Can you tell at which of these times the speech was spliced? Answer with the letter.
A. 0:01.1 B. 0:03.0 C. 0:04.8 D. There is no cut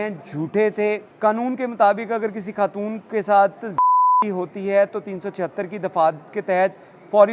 A